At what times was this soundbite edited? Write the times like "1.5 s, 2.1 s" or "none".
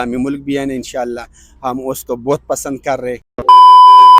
3.3 s